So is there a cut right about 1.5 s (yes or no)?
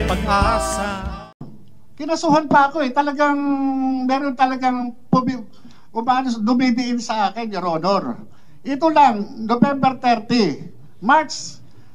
yes